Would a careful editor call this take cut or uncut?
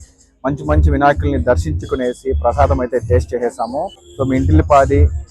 cut